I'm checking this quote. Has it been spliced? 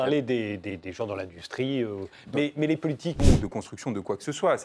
yes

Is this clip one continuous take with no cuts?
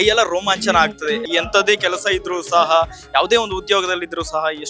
no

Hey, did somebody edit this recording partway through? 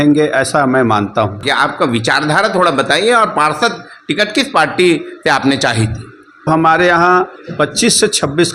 yes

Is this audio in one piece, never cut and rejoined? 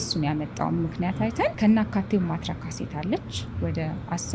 no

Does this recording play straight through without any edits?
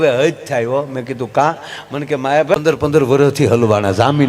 no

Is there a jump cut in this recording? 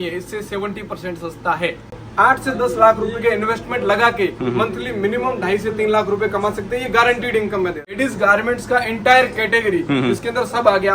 yes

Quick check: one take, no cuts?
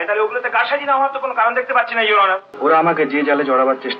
no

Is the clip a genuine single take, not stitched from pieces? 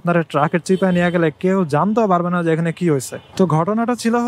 no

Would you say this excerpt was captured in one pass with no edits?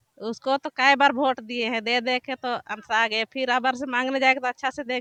yes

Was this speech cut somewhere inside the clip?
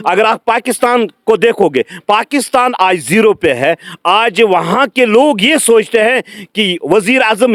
no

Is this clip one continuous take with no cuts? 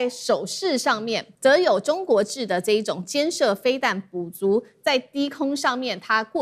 no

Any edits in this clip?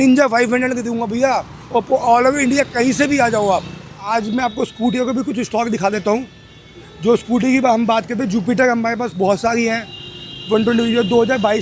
no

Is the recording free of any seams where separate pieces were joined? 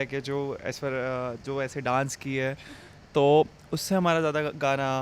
yes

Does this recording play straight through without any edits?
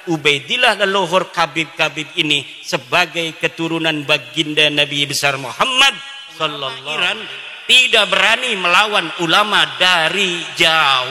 no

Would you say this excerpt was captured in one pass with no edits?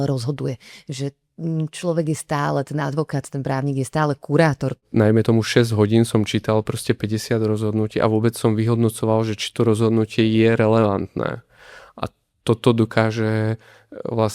no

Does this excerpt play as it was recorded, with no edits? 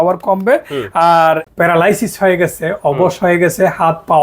no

